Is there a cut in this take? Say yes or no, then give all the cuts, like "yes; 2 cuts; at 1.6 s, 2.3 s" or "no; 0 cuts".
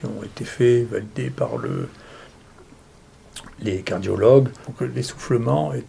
yes; 1 cut; at 4.6 s